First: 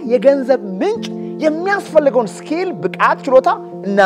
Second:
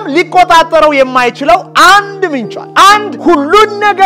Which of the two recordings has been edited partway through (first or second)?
second